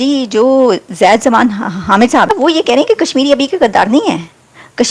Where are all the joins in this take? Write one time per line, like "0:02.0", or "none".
0:02.3